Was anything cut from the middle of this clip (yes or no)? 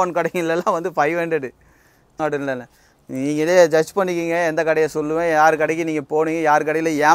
yes